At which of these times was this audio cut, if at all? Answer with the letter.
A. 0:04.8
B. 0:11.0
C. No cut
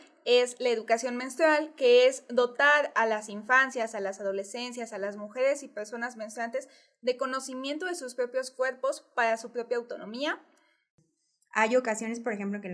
B